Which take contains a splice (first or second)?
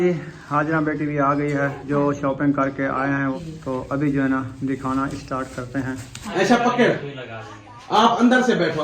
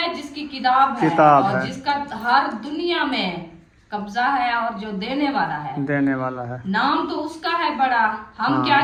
first